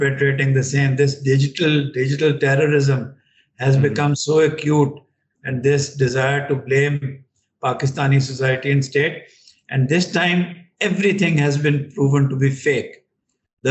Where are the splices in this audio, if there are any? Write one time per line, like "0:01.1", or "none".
none